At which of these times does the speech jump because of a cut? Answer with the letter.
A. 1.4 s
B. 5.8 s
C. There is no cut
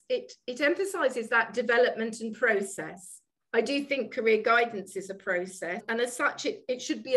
B